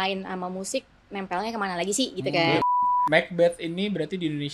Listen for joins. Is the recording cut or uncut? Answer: cut